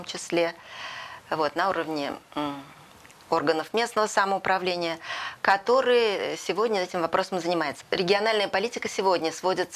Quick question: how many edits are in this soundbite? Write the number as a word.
one